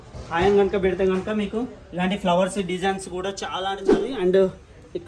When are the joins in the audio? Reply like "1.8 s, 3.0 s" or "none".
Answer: 4.1 s